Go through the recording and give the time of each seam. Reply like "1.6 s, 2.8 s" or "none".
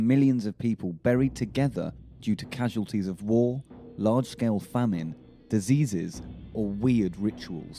6.1 s